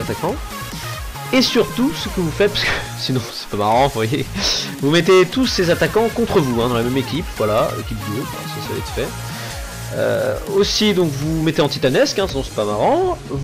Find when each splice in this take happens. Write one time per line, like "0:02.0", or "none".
0:08.8